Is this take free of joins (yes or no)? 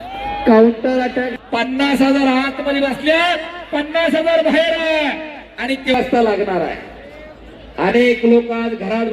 no